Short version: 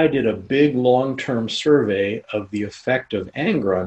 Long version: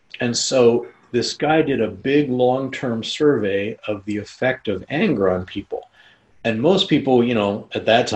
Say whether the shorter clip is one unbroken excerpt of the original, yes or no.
yes